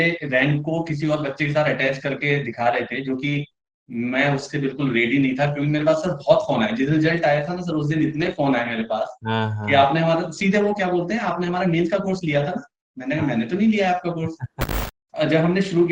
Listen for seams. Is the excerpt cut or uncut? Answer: cut